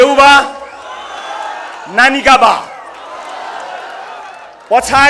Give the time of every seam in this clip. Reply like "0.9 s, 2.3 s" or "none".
none